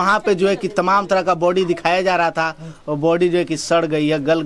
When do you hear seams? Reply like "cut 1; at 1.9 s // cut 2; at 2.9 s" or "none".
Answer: none